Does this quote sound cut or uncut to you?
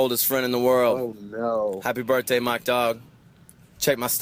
uncut